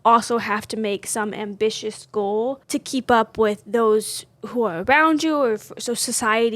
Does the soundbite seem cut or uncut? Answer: cut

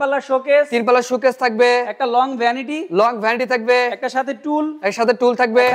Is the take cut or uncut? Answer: uncut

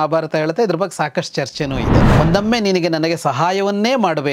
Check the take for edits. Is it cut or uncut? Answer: cut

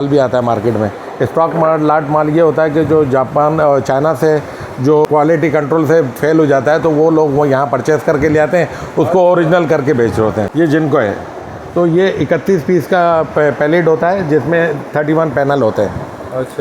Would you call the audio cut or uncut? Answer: cut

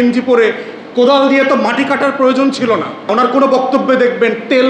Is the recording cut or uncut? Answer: cut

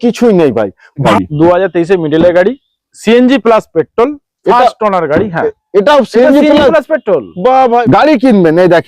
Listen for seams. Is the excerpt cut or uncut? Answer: cut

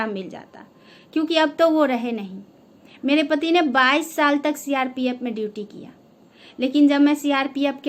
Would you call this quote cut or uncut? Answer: uncut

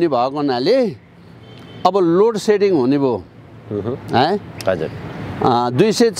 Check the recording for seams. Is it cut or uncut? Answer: uncut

